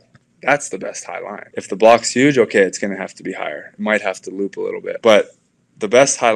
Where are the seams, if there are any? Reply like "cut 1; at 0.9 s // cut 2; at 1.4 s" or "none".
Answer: cut 1; at 1.4 s // cut 2; at 5.0 s